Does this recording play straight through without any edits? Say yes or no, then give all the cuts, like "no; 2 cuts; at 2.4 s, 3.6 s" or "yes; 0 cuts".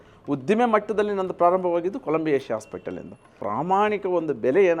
no; 1 cut; at 3.3 s